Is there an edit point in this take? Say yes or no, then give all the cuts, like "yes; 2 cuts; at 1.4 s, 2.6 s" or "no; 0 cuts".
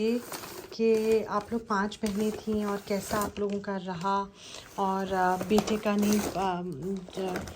no; 0 cuts